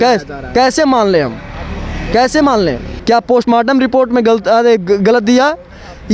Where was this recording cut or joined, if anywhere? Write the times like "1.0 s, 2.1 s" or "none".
2.9 s